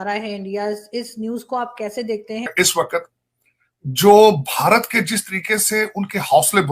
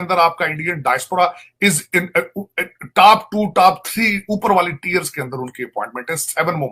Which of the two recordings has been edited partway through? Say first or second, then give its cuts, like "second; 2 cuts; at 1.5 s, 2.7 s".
first; 1 cut; at 2.5 s